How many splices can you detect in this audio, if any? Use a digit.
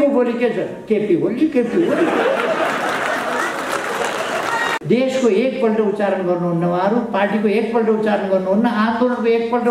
1